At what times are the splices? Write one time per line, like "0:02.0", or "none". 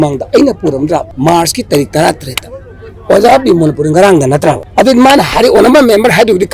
0:01.1
0:04.6